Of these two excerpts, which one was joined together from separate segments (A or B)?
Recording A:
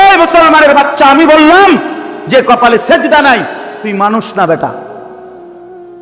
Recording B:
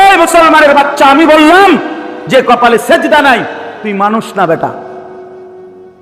A